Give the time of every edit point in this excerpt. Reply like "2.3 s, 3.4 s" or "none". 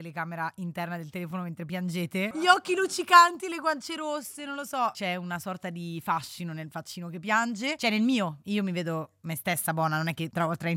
none